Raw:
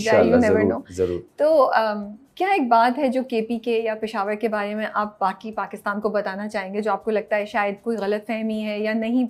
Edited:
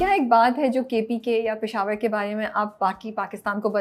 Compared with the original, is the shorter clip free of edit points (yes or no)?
yes